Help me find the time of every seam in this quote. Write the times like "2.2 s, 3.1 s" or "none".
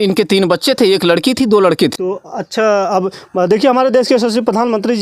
none